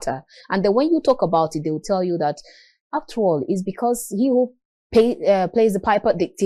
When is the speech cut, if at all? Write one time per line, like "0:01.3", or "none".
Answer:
none